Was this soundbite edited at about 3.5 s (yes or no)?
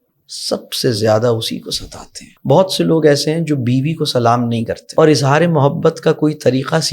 no